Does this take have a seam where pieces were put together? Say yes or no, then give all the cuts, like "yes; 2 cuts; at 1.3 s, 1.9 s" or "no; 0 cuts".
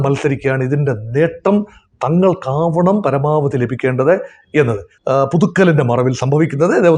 yes; 1 cut; at 4.9 s